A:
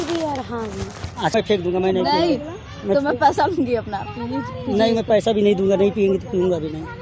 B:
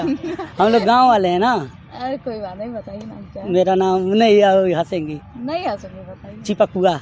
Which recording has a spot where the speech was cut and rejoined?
A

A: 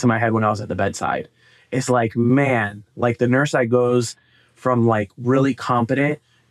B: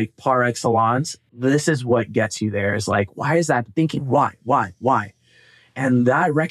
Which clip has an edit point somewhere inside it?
B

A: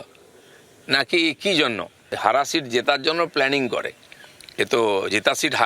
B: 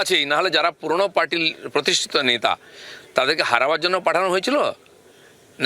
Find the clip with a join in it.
A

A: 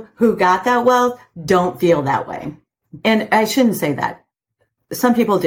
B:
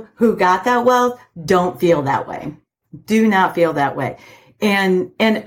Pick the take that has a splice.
A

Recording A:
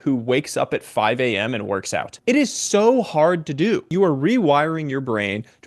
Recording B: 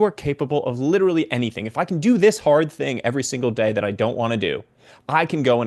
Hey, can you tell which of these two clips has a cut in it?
A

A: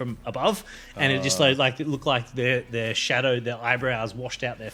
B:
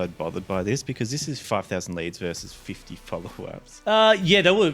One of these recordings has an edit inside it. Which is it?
B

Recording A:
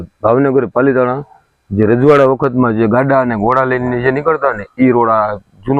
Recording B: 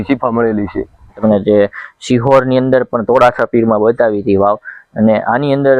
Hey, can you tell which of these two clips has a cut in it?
B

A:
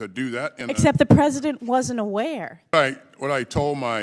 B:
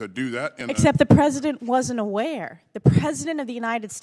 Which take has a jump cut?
A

